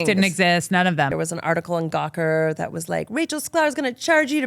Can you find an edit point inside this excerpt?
yes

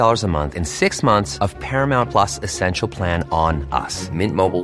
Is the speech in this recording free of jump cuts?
yes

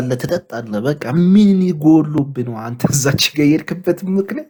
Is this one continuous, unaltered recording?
yes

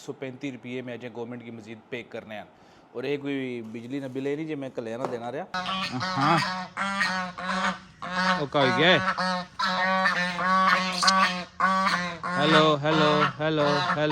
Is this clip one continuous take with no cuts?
no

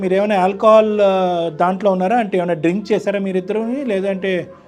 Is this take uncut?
yes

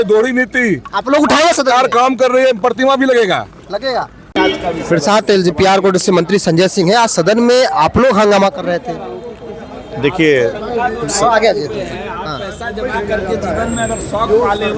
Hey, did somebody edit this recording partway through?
no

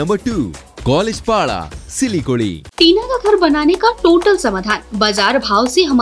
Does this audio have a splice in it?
yes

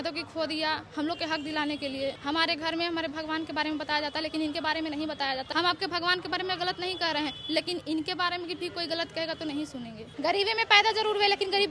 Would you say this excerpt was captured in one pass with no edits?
no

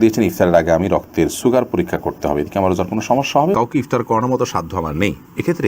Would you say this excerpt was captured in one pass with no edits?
no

